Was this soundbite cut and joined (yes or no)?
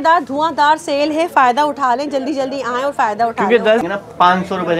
yes